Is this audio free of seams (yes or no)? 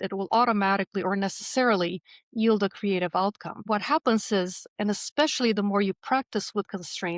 no